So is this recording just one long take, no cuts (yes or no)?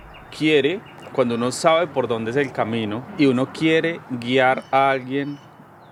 yes